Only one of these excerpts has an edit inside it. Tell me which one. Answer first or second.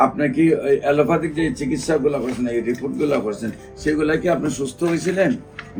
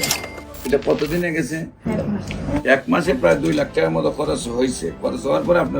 second